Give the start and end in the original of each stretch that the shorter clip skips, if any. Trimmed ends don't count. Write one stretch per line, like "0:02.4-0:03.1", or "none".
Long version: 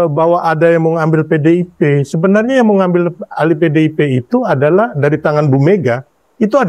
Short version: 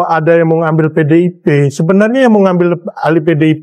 none